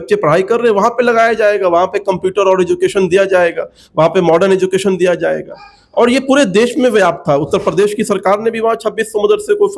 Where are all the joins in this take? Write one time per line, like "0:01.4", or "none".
none